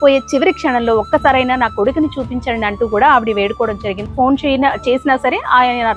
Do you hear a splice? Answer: yes; 1 cut; at 3.9 s

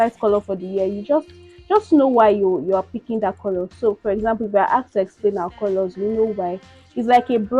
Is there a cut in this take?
no; 0 cuts

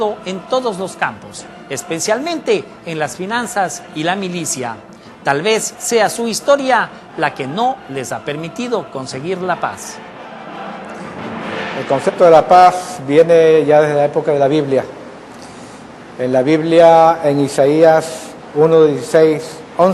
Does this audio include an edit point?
yes; 1 cut; at 14.1 s

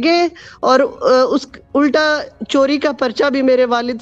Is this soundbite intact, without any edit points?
yes; 0 cuts

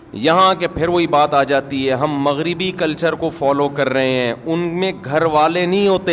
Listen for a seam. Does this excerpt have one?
no; 0 cuts

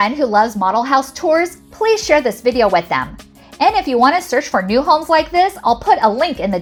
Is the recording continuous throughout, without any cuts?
yes; 0 cuts

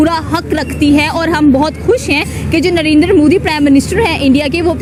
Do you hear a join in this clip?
no; 0 cuts

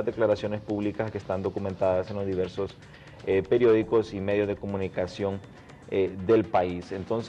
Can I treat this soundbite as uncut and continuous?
yes; 0 cuts

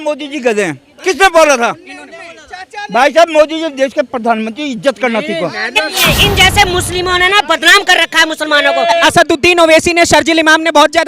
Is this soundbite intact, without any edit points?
no; 2 cuts; at 6.0 s, 9.0 s

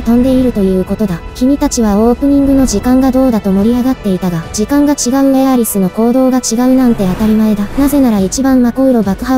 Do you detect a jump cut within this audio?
yes; 1 cut; at 1.2 s

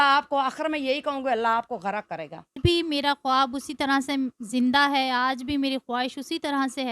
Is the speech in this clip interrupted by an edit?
yes; 1 cut; at 2.6 s

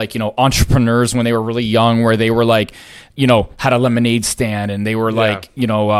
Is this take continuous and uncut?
yes; 0 cuts

